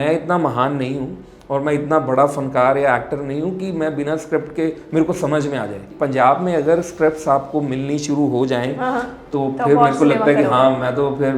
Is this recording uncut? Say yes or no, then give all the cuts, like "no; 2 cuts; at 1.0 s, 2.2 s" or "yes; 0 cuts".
no; 1 cut; at 5.9 s